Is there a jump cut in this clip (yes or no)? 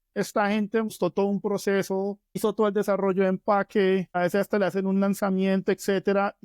yes